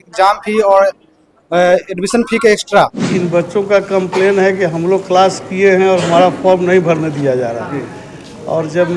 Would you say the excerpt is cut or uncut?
cut